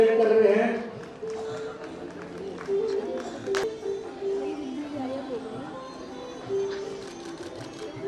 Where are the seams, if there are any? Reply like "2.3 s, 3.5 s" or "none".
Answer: 3.6 s